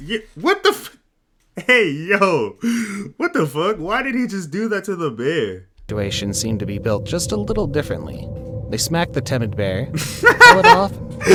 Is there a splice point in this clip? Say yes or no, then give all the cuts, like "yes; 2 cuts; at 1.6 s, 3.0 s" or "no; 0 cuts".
no; 0 cuts